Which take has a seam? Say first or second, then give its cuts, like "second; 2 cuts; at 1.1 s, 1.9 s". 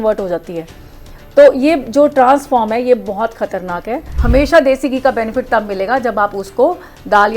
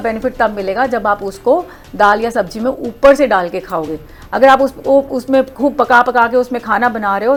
first; 1 cut; at 4.1 s